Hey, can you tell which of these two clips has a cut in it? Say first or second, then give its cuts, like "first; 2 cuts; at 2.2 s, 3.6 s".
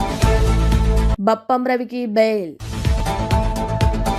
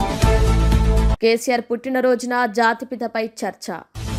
first; 1 cut; at 1.1 s